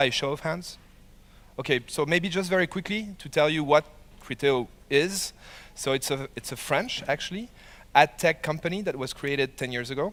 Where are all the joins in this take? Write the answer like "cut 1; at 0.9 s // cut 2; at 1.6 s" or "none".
none